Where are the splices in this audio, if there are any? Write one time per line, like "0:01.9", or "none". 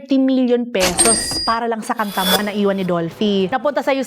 0:02.4